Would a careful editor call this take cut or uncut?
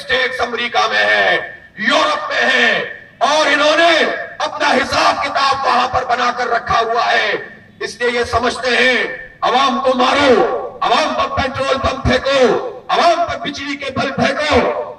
uncut